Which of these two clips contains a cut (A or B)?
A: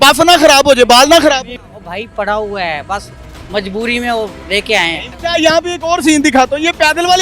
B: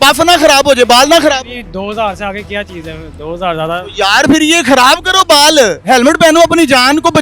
A